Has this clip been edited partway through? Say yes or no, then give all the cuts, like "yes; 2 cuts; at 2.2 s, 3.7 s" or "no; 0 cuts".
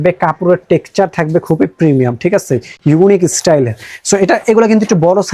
no; 0 cuts